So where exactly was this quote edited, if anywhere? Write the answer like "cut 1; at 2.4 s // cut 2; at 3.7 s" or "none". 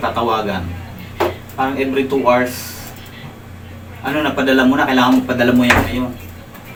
none